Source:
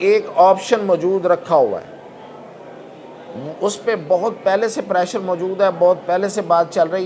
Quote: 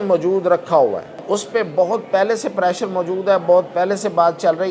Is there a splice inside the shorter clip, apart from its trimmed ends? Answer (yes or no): yes